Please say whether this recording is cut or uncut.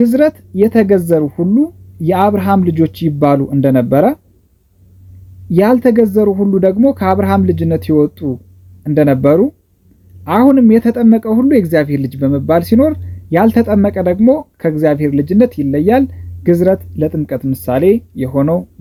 uncut